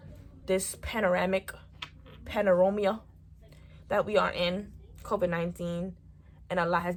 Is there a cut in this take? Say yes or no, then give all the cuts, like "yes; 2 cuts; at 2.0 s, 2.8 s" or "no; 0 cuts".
no; 0 cuts